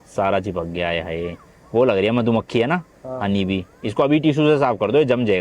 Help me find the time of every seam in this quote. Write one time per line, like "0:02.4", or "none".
none